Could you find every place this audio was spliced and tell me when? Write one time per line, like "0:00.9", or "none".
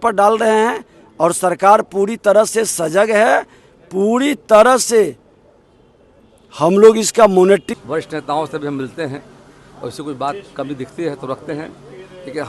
0:07.7